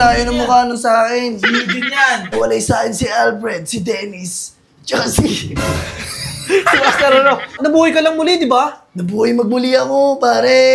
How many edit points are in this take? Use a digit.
2